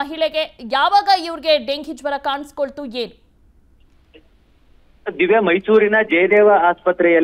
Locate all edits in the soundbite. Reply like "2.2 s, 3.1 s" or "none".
4.5 s